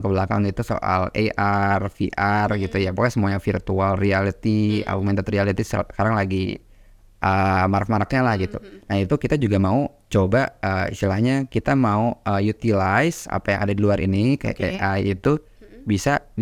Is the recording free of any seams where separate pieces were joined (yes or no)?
yes